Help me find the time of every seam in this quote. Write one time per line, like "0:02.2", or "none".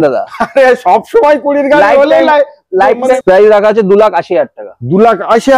0:03.2